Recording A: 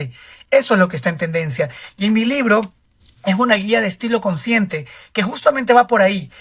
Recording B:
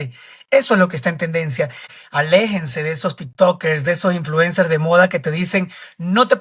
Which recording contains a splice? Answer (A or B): B